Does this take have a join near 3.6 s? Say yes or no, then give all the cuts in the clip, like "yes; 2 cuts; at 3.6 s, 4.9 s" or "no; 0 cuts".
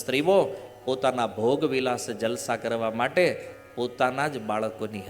no; 0 cuts